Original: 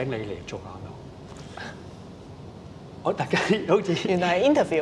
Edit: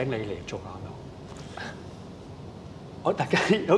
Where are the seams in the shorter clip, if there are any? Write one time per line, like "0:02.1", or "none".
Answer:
none